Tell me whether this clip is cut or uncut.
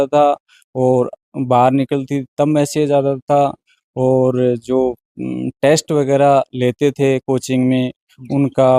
uncut